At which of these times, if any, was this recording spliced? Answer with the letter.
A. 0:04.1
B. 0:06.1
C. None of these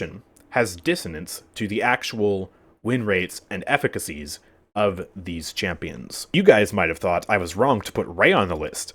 B